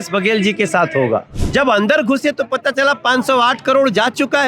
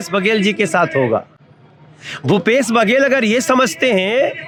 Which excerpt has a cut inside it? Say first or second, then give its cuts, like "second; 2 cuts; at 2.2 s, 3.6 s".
first; 1 cut; at 1.4 s